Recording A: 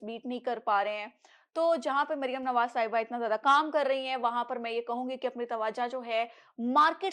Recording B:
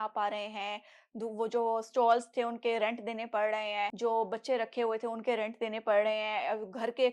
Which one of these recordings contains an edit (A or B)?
B